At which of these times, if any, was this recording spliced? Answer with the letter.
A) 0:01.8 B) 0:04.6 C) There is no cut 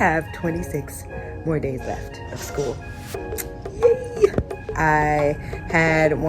B